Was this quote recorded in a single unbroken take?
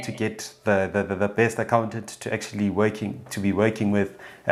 yes; 0 cuts

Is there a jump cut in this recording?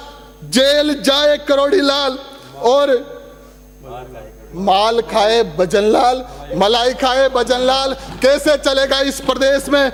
no; 0 cuts

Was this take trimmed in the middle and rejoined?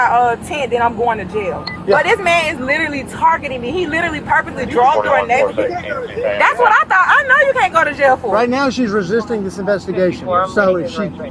no; 0 cuts

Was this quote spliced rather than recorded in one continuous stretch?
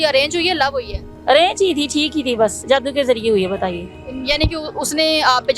no; 0 cuts

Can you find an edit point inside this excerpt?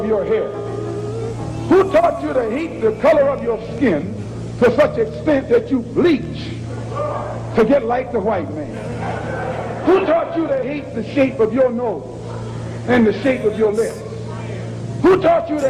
no; 0 cuts

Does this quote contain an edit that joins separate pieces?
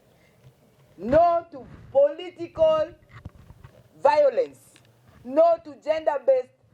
no; 0 cuts

